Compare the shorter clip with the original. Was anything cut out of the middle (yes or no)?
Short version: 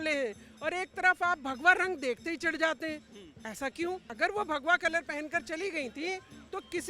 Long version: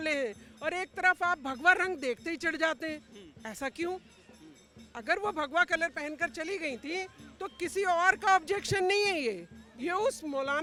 yes